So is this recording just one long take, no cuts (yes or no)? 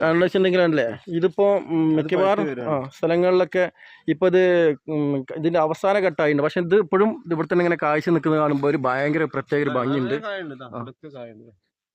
yes